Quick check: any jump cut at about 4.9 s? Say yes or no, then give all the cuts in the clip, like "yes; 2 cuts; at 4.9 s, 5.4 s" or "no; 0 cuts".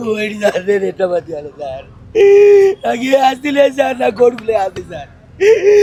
no; 0 cuts